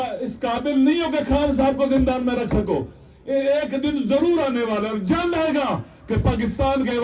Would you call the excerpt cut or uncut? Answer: uncut